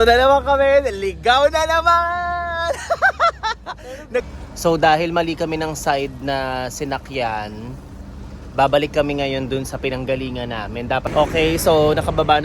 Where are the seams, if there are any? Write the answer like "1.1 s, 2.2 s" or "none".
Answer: 4.3 s, 11.0 s